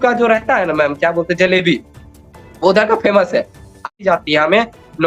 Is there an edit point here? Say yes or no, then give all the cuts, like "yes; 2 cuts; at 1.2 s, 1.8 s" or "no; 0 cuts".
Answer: yes; 1 cut; at 3.9 s